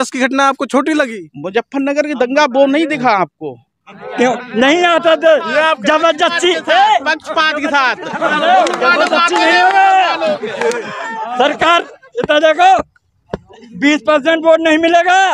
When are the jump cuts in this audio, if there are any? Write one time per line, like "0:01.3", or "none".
0:04.0